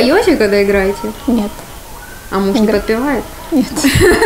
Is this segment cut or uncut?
uncut